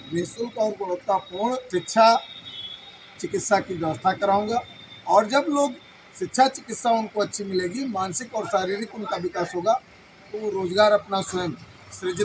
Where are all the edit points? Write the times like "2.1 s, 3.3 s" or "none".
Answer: 1.6 s